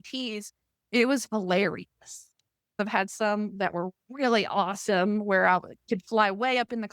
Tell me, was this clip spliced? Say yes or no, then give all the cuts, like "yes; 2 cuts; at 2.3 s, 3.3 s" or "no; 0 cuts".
yes; 1 cut; at 2.8 s